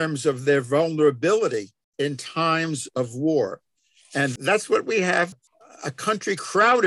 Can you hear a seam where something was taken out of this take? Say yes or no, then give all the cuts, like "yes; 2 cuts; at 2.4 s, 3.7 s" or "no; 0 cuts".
yes; 2 cuts; at 1.8 s, 5.3 s